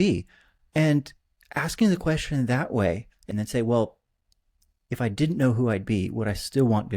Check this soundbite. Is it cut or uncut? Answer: cut